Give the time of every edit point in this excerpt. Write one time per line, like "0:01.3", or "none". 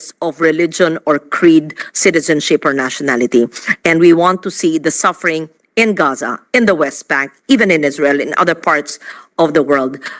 none